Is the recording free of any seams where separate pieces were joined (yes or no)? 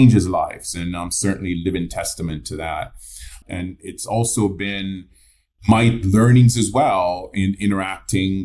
no